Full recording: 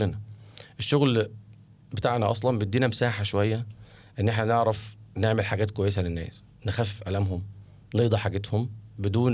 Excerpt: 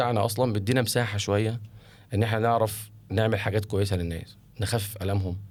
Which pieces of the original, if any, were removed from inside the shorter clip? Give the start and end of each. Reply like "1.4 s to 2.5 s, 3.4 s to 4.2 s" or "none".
none